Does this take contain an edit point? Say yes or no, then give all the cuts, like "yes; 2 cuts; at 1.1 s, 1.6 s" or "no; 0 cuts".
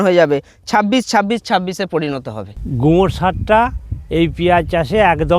yes; 1 cut; at 2.5 s